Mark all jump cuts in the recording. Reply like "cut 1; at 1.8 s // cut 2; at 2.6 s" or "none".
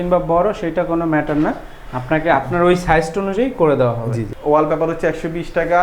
cut 1; at 4.2 s